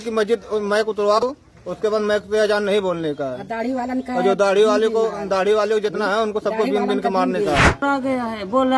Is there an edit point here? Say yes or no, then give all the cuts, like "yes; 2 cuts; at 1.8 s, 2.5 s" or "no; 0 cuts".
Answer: yes; 2 cuts; at 1.2 s, 7.8 s